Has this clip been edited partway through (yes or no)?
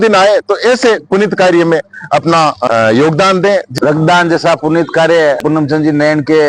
yes